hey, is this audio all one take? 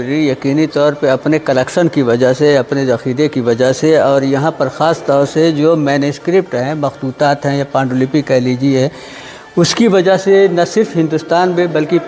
yes; 0 cuts

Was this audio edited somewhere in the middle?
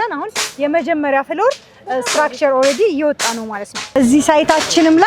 yes; 1 cut; at 3.9 s

